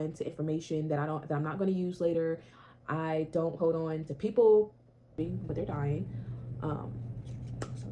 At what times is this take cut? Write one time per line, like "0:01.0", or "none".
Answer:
0:05.2